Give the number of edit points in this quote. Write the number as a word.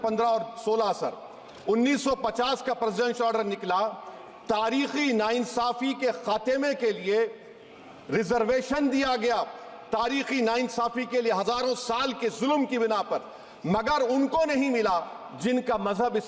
zero